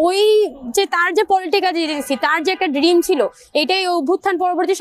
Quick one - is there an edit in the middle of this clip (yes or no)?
no